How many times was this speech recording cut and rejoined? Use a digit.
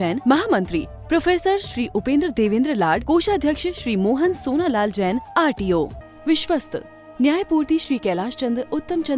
1